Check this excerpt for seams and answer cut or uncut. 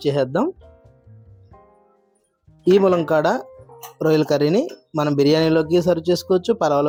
uncut